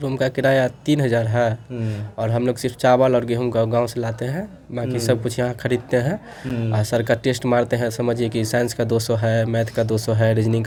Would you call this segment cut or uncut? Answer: uncut